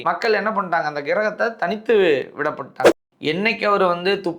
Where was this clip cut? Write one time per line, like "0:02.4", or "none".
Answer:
0:03.0